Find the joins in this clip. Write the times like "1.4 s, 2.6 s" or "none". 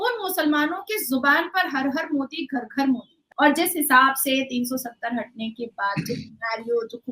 3.2 s